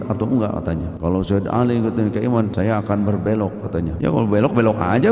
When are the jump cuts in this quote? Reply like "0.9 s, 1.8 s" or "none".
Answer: 0.9 s, 2.5 s, 3.9 s